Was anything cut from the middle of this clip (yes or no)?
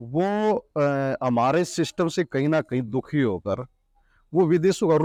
no